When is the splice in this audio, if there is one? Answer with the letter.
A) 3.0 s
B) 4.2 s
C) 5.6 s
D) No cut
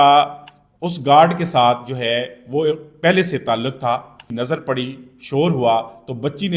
B